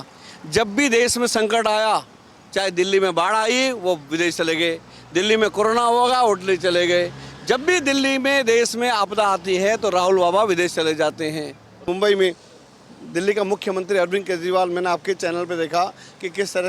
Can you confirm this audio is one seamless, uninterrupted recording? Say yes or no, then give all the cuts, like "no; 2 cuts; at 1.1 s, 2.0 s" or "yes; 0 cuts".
no; 1 cut; at 11.8 s